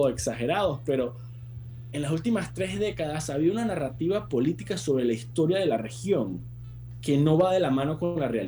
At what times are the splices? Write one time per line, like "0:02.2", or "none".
none